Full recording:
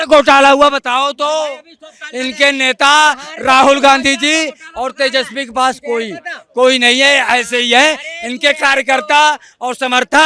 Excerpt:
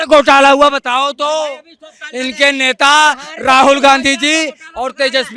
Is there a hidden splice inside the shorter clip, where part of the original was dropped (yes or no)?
no